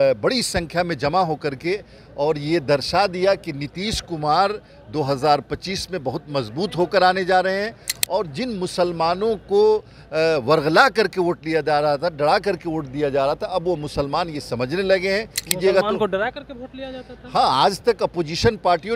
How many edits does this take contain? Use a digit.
1